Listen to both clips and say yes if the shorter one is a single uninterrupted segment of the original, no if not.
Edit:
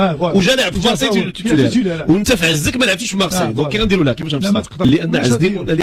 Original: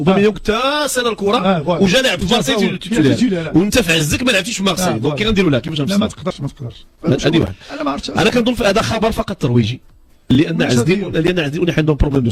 no